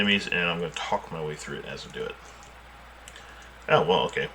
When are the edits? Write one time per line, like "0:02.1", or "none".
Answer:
0:02.8